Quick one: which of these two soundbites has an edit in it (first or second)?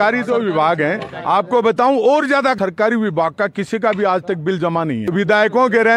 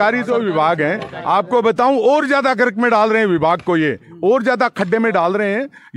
first